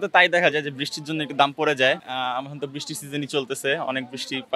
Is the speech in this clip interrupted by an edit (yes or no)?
no